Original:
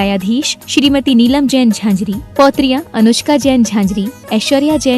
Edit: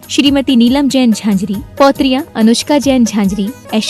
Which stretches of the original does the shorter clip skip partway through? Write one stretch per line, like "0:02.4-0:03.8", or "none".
none